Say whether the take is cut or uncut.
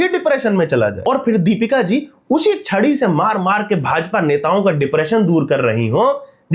cut